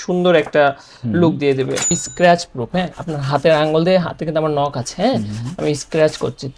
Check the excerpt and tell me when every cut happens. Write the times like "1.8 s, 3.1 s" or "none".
2.0 s